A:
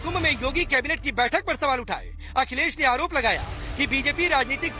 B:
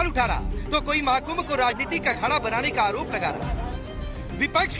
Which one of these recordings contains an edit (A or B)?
B